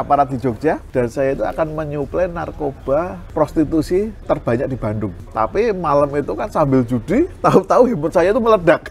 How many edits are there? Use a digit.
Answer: 4